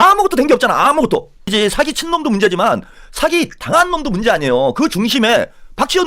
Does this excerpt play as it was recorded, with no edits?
no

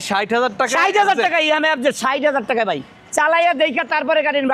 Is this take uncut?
yes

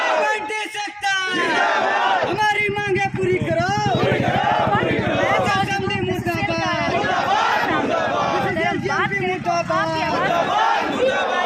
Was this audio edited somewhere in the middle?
no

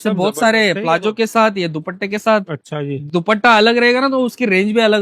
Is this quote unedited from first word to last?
yes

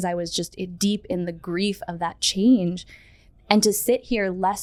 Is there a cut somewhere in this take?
no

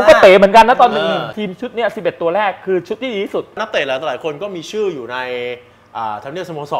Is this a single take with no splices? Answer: no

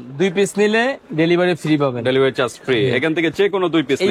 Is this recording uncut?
yes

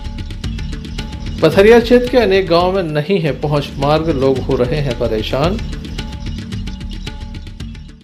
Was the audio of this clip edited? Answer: no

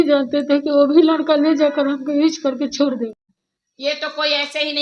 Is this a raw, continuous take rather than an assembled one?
no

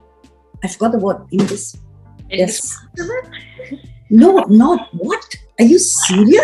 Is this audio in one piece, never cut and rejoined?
yes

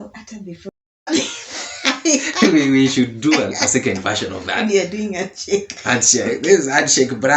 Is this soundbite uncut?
no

